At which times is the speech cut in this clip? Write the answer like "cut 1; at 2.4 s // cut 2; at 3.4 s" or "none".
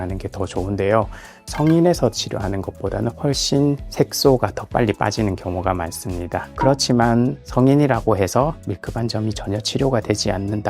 cut 1; at 1.5 s // cut 2; at 6.5 s